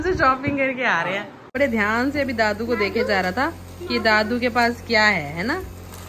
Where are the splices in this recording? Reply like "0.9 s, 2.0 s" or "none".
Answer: 1.5 s